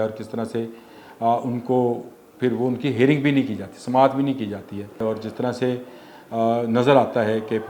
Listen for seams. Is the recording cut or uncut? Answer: cut